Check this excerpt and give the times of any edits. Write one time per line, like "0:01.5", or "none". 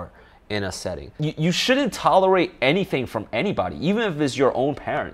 0:01.2